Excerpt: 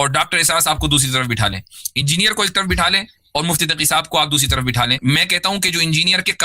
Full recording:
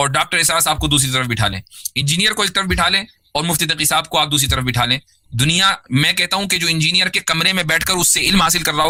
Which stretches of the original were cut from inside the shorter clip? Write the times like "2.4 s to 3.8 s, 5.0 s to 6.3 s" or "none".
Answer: 5.0 s to 5.8 s